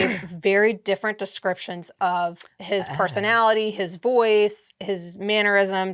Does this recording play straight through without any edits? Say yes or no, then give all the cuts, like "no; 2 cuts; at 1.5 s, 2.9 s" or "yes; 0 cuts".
yes; 0 cuts